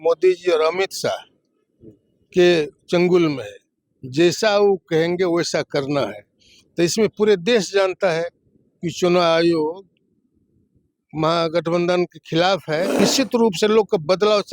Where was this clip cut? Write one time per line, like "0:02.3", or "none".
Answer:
0:13.0